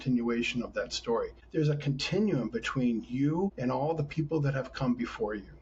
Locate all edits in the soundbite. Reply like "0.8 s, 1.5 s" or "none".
1.4 s, 3.6 s